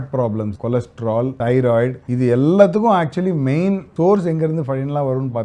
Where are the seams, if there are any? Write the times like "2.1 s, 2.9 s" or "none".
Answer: 0.9 s, 2.0 s, 3.9 s